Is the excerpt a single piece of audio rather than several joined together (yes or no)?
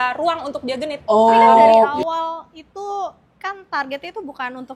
no